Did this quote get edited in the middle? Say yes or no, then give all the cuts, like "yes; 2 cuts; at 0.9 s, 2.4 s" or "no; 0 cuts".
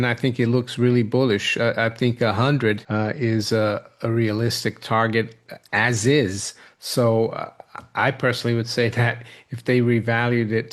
yes; 1 cut; at 2.8 s